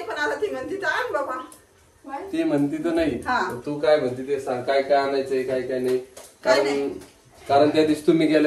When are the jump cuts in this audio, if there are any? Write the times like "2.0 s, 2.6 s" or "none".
none